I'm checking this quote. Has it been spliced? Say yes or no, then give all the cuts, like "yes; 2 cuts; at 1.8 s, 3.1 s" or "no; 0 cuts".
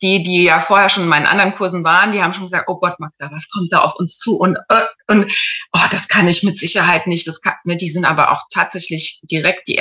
no; 0 cuts